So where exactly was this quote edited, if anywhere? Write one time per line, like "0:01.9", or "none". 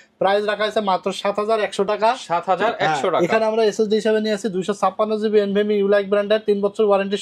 none